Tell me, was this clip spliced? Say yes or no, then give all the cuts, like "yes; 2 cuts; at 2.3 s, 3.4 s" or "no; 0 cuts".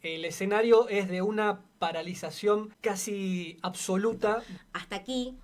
yes; 2 cuts; at 2.7 s, 4.5 s